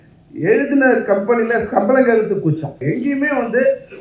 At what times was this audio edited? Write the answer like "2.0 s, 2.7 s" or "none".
2.8 s

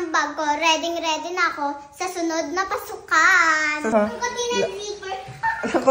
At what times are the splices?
3.9 s

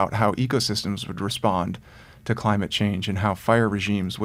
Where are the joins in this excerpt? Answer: none

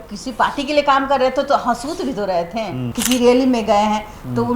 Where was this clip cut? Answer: 2.8 s

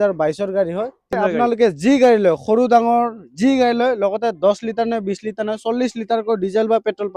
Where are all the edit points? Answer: 1.1 s

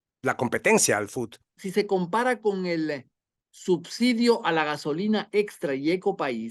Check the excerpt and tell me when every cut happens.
1.5 s

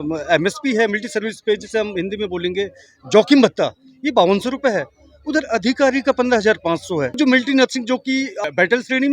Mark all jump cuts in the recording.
7.2 s, 8.3 s

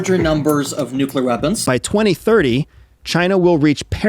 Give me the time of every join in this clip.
1.6 s

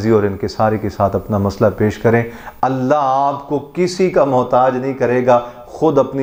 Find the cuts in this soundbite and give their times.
none

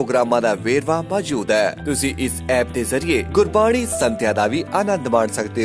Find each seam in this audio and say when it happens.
none

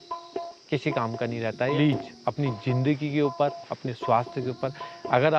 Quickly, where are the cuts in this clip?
1.8 s

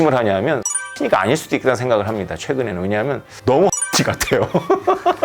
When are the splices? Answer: 0.9 s

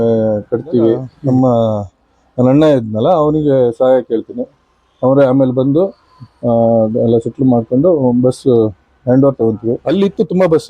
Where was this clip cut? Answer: 1.1 s, 9.8 s

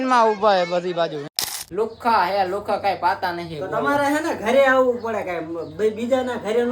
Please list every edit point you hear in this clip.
1.6 s

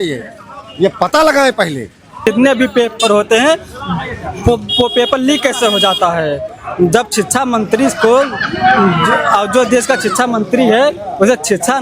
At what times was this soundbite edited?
2.3 s

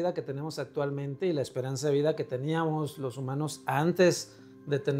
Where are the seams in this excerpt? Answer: none

